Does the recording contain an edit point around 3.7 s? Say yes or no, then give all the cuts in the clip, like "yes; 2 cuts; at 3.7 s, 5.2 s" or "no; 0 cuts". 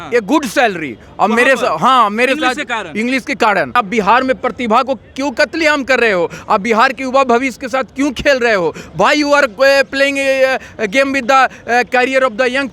yes; 1 cut; at 3.7 s